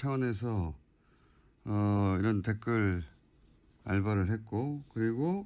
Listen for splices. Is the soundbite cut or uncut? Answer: uncut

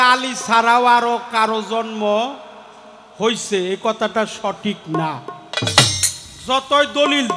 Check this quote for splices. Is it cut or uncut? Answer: uncut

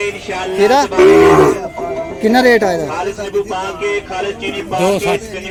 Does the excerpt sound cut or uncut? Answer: uncut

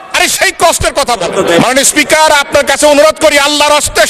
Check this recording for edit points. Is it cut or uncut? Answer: cut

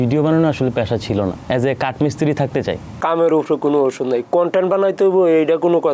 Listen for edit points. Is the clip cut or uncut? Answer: cut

